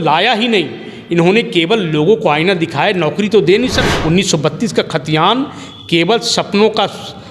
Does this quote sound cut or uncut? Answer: cut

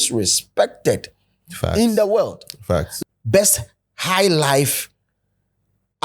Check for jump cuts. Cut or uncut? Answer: cut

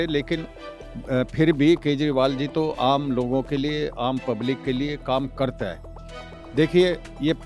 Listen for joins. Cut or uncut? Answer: uncut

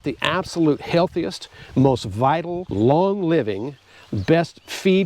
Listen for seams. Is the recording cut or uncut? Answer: cut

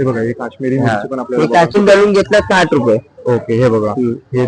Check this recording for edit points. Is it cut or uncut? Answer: cut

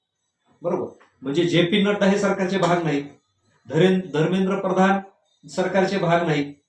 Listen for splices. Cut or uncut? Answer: uncut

